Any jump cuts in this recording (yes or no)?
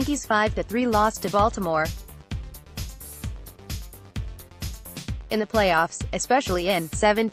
yes